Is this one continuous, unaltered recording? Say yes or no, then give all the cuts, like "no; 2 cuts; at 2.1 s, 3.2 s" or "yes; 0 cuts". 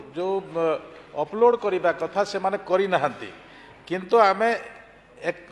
yes; 0 cuts